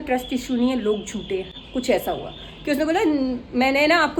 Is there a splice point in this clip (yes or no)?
no